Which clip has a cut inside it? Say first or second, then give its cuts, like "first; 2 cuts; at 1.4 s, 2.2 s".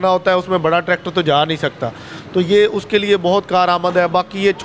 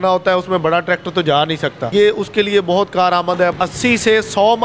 second; 2 cuts; at 1.9 s, 3.5 s